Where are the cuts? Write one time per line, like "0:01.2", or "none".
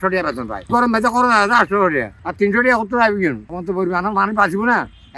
0:00.7
0:03.5